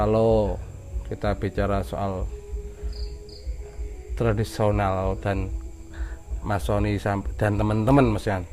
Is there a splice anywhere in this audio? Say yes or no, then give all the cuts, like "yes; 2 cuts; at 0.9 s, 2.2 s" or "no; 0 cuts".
no; 0 cuts